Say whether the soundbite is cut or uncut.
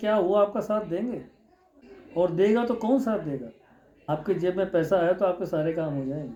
uncut